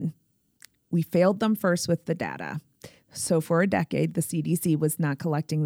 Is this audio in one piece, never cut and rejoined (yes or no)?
yes